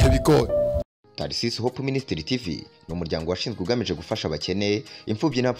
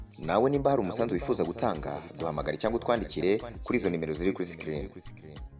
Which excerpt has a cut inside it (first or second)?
first